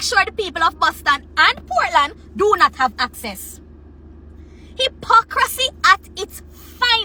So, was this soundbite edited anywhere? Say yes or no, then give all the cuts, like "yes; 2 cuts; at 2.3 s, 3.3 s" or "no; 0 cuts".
no; 0 cuts